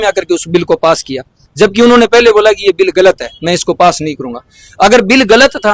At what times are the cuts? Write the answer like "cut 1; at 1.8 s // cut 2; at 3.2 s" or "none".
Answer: none